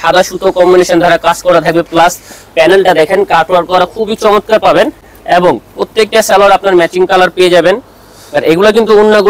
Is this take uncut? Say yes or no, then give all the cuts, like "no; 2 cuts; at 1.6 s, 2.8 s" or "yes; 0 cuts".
yes; 0 cuts